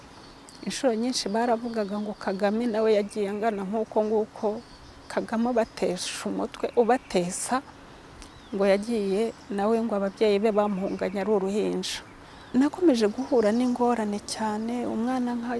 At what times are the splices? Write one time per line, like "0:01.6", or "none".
0:12.5